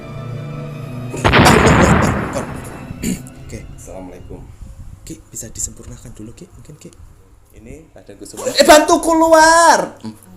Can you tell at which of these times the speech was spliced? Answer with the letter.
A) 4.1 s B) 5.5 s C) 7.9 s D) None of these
C